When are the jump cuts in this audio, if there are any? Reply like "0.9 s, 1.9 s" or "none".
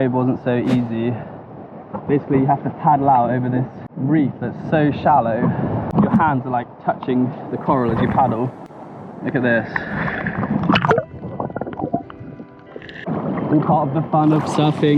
3.8 s, 5.9 s, 13.0 s